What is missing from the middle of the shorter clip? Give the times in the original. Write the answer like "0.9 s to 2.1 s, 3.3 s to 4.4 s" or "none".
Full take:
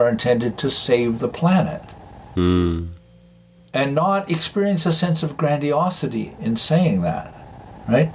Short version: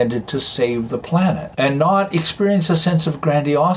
1.8 s to 3.6 s